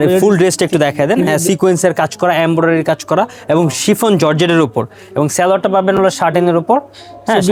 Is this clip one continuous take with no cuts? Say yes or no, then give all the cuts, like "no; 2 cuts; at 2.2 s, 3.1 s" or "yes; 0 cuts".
yes; 0 cuts